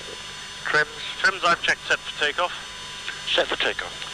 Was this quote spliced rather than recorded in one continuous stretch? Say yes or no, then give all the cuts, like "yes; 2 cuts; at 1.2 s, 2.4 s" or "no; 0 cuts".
no; 0 cuts